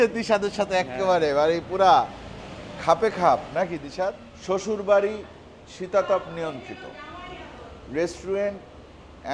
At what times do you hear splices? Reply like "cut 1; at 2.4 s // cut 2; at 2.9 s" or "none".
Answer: none